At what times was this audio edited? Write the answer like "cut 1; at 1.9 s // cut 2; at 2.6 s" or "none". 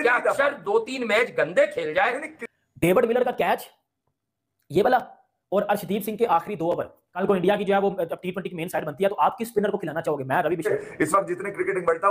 cut 1; at 2.3 s // cut 2; at 7.0 s // cut 3; at 10.7 s